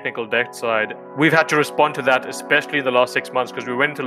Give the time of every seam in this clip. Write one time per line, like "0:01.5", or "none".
0:01.0